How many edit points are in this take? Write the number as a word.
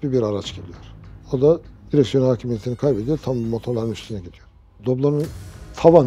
one